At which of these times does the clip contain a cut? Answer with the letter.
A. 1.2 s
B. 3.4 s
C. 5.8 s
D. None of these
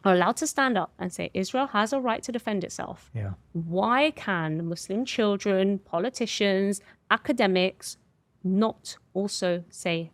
D